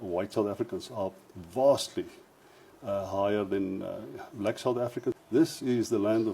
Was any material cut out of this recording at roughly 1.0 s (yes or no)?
no